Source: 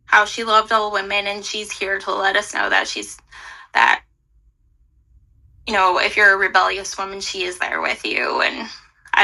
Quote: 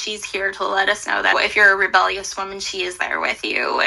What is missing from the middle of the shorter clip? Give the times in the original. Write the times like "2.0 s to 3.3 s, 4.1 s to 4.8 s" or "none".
2.8 s to 5.9 s